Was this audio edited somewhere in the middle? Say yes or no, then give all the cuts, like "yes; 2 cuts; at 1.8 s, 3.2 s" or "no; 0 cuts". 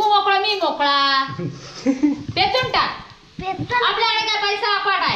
no; 0 cuts